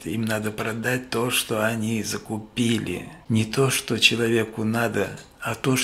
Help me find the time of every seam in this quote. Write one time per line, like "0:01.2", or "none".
0:03.1